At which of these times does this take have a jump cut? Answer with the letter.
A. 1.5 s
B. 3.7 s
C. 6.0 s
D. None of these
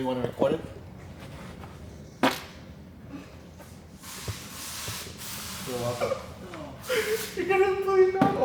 D